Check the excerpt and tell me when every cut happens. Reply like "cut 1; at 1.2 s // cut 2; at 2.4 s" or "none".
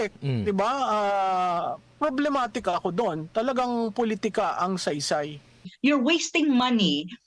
cut 1; at 5.7 s

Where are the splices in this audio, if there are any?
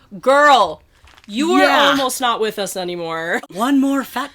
cut 1; at 3.3 s

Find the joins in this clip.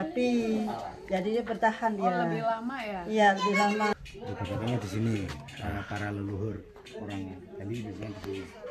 cut 1; at 3.9 s

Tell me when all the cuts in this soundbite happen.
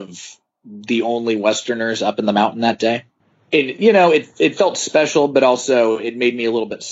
none

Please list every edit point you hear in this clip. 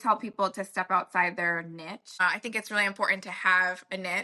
cut 1; at 2.2 s

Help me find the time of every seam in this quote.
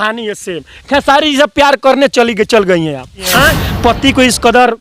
cut 1; at 3.6 s

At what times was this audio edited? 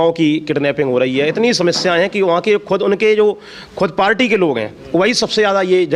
none

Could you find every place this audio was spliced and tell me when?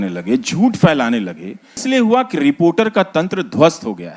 cut 1; at 1.8 s

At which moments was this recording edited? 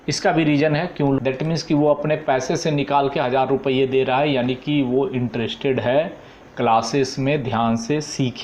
cut 1; at 1.2 s

